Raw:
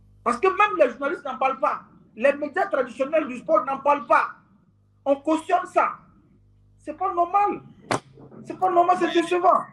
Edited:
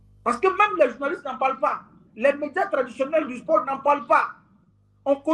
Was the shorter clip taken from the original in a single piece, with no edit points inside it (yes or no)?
yes